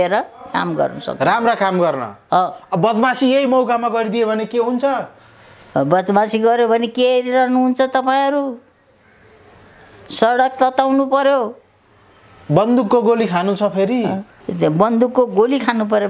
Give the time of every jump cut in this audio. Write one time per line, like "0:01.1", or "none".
0:14.4